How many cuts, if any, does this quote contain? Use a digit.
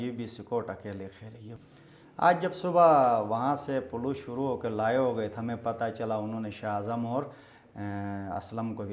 1